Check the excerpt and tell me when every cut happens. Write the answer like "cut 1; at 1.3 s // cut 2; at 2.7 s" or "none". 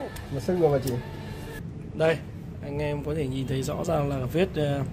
cut 1; at 1.6 s